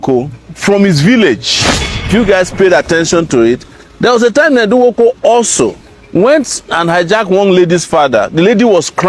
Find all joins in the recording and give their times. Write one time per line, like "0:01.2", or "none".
0:02.1
0:05.9